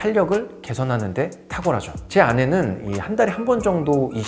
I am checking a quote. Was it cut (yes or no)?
no